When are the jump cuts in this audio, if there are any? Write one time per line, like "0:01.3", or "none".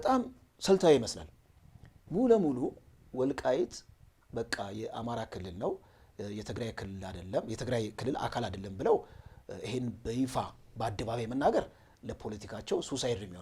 none